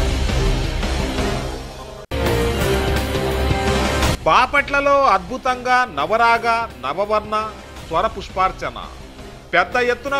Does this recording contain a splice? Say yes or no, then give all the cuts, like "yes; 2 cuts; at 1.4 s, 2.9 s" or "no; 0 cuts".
yes; 2 cuts; at 2.1 s, 4.2 s